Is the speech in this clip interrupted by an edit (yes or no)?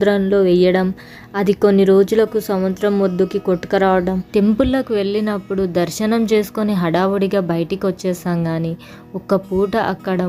yes